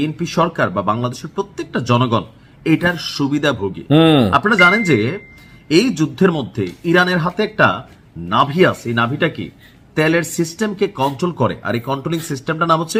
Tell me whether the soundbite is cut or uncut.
uncut